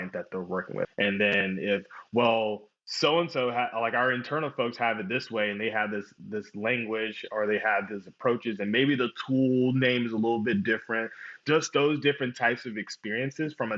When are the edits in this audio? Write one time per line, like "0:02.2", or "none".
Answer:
0:00.9
0:11.3